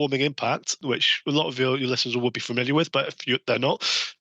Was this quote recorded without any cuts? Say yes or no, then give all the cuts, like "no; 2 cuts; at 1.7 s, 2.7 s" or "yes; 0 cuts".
no; 1 cut; at 1.0 s